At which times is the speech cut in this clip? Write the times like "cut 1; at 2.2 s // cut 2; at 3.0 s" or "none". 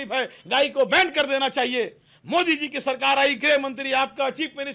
none